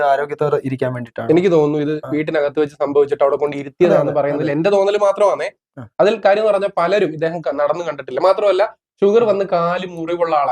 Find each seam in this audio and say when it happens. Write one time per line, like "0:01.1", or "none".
none